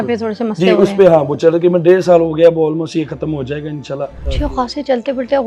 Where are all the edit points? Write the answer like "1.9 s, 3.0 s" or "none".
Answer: 4.2 s